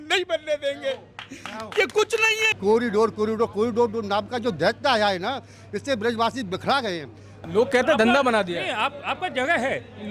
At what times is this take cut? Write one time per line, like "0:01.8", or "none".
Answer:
0:02.6
0:07.5